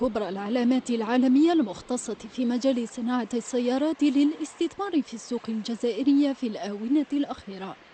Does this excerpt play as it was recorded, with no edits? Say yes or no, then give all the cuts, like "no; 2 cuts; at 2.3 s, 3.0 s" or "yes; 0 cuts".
no; 1 cut; at 3.6 s